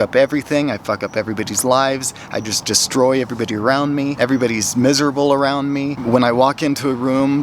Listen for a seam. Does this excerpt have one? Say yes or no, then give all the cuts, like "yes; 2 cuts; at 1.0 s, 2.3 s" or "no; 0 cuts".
yes; 2 cuts; at 4.1 s, 6.0 s